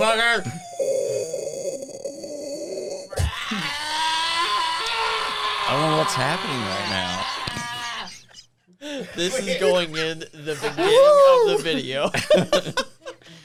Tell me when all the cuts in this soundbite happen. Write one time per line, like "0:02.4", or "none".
none